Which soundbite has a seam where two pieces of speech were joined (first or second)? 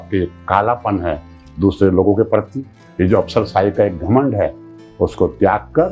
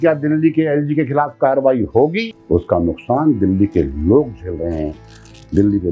second